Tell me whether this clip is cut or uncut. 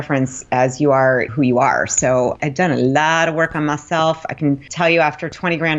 cut